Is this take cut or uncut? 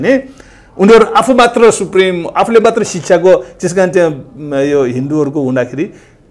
uncut